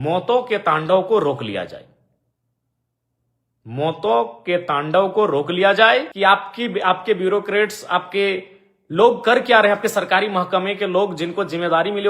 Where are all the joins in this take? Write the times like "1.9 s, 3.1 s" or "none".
6.1 s